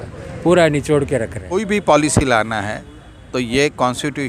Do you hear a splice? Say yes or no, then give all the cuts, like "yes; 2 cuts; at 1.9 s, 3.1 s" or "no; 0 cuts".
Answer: yes; 1 cut; at 1.6 s